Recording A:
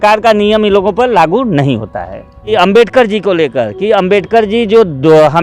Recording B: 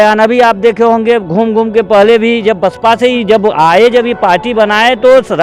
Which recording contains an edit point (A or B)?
A